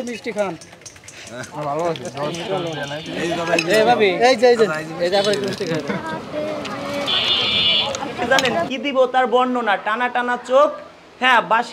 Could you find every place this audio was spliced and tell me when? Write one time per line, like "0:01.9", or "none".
0:08.3

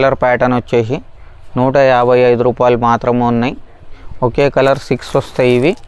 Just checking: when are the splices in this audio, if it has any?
none

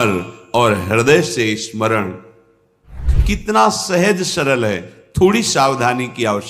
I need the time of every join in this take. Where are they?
0:03.1

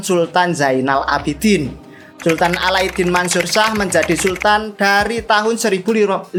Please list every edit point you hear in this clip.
none

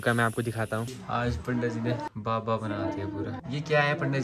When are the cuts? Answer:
0:01.0
0:02.1
0:03.4

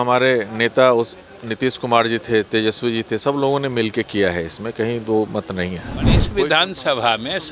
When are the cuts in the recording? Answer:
0:06.3

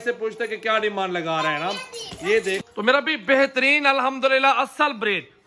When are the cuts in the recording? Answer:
0:02.6

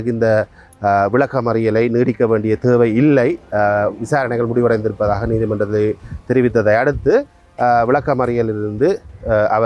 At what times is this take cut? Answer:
none

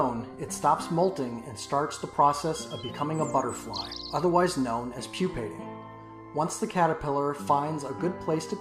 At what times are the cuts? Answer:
none

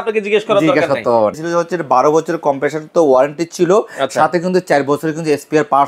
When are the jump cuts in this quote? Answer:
0:01.4

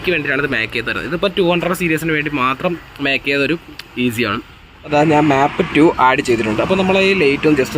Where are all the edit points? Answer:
0:04.7

